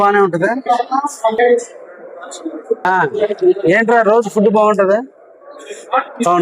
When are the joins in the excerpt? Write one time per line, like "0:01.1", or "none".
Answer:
0:02.9